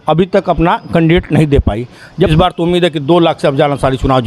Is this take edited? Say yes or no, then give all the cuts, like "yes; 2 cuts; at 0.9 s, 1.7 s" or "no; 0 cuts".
yes; 1 cut; at 2.3 s